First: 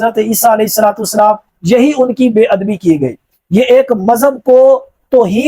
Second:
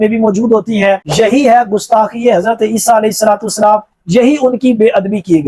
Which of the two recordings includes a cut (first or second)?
second